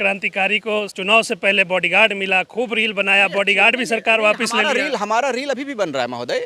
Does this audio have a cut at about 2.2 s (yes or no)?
no